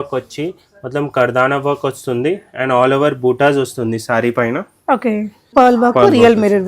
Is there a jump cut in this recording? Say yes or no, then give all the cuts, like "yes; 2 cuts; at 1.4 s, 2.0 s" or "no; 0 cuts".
yes; 1 cut; at 5.5 s